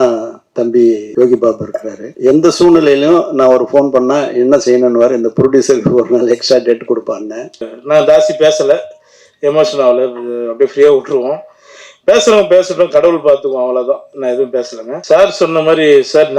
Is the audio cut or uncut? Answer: cut